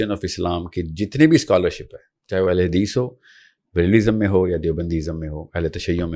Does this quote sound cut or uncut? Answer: uncut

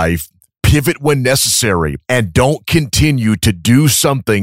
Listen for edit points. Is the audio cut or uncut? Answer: cut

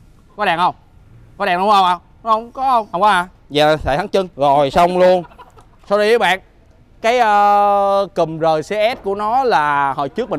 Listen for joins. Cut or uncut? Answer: cut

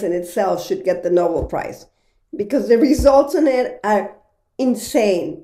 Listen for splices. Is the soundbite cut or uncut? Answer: uncut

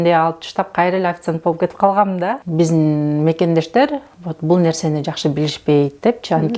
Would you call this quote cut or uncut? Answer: cut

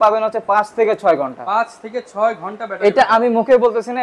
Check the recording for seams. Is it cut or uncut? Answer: uncut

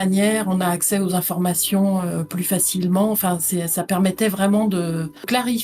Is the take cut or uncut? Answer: uncut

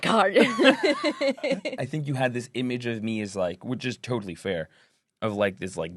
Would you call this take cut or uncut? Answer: cut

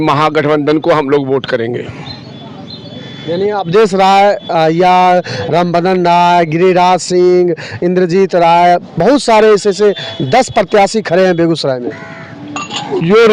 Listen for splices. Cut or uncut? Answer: uncut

